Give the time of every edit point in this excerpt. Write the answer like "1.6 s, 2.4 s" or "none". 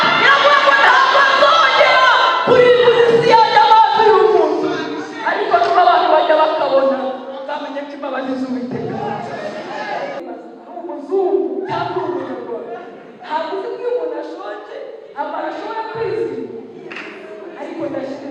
10.2 s